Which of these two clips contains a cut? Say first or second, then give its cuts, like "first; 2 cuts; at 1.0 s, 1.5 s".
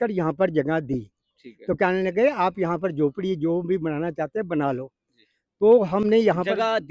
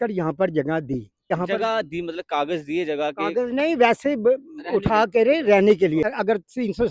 second; 2 cuts; at 1.3 s, 6.0 s